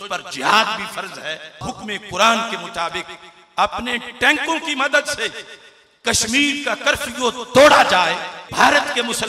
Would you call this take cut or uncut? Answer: cut